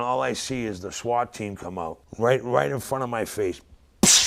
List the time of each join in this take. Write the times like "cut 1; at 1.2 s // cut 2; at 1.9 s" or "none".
cut 1; at 2.0 s